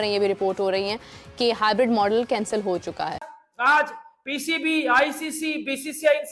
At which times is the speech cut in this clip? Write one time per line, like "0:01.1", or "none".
0:03.3